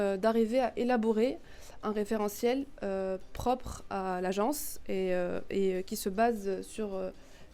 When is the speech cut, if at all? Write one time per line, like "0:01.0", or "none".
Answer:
none